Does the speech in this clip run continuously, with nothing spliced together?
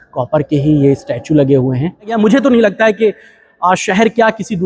no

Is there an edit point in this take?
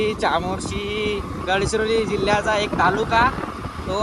yes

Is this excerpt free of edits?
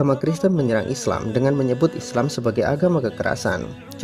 yes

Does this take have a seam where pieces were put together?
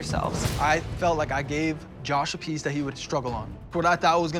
no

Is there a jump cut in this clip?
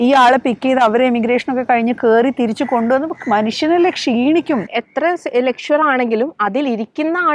yes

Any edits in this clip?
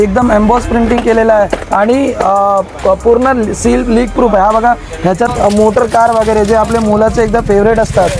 yes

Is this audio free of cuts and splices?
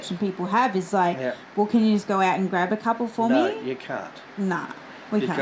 yes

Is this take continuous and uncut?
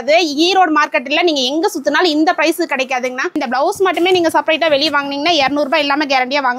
no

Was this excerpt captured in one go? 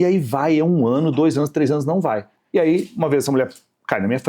no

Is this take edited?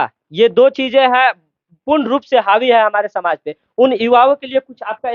no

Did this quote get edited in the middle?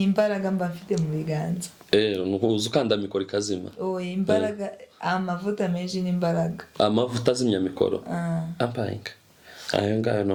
no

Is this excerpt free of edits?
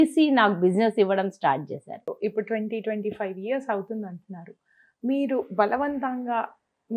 no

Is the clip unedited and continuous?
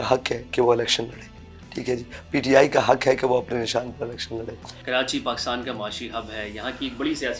yes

